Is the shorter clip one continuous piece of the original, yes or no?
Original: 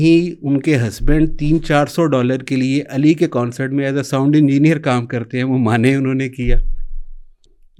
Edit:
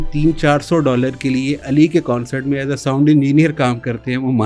yes